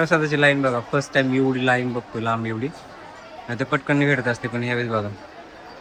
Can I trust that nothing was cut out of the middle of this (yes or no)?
yes